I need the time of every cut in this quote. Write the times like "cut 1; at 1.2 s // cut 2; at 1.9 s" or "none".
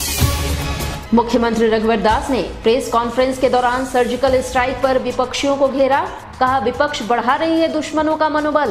cut 1; at 1.0 s